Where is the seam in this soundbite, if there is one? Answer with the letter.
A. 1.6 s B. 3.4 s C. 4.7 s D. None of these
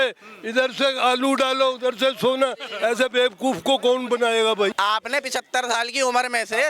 C